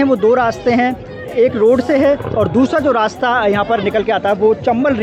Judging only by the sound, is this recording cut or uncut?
uncut